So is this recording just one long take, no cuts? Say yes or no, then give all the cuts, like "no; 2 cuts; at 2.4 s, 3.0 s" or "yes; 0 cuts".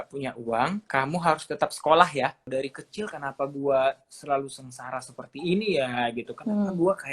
no; 2 cuts; at 0.8 s, 2.5 s